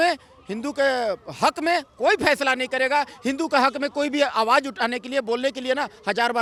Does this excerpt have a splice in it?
no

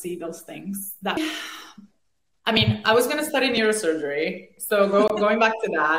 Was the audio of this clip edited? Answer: yes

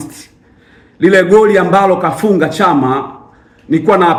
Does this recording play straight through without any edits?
yes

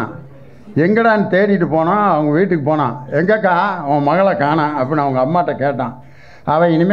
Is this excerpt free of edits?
yes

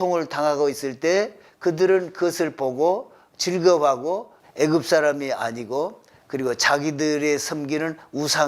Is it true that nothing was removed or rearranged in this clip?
no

